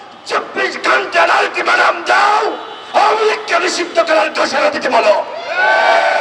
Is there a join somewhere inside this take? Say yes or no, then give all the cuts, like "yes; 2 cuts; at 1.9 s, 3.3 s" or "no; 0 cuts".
no; 0 cuts